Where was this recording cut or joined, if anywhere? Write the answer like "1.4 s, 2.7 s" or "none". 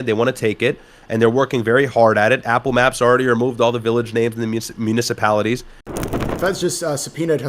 6.1 s